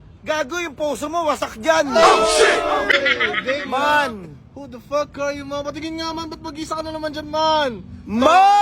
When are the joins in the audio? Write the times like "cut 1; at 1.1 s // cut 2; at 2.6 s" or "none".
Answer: cut 1; at 2.9 s